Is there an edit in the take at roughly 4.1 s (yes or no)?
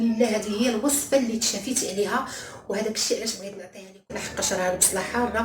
yes